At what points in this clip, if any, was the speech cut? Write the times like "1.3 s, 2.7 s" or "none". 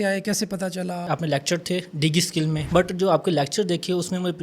1.0 s, 2.7 s